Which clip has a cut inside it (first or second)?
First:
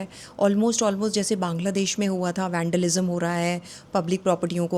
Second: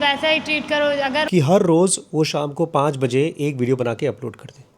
second